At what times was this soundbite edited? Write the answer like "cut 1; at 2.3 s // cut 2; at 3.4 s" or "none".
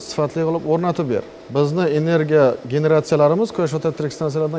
cut 1; at 1.4 s